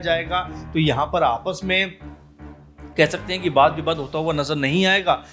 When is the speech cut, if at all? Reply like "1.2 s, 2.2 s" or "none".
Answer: none